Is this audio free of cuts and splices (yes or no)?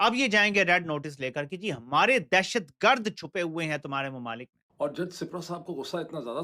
yes